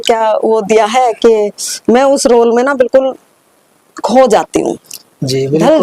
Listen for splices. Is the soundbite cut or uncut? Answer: uncut